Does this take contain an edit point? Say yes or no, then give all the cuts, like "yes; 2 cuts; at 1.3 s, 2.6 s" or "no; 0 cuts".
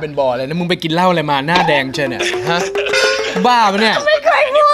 no; 0 cuts